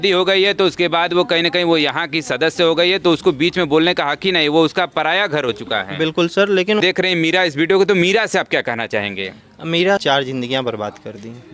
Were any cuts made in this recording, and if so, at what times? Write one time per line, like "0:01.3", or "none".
0:06.8
0:10.0